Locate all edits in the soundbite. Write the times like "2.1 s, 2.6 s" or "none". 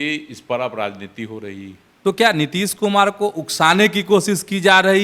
1.9 s